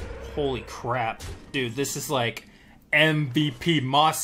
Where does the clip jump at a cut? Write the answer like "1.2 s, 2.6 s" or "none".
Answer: 1.3 s